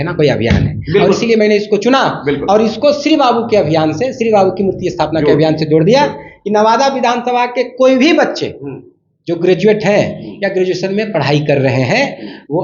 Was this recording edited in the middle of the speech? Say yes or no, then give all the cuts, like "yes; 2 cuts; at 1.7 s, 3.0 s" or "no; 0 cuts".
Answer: no; 0 cuts